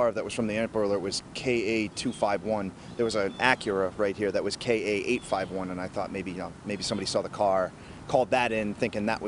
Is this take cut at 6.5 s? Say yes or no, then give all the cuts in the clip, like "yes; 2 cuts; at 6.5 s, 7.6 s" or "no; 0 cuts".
no; 0 cuts